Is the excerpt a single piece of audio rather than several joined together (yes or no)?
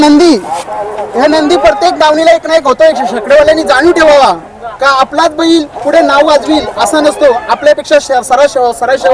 yes